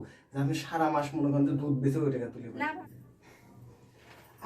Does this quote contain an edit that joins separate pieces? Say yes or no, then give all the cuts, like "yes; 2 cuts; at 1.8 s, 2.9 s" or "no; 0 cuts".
yes; 1 cut; at 2.8 s